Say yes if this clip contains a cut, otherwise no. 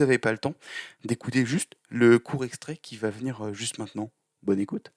no